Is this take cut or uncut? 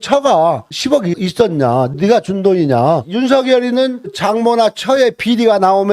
cut